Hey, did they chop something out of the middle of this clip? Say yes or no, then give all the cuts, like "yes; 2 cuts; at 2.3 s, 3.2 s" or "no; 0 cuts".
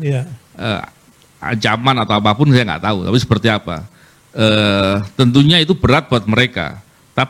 no; 0 cuts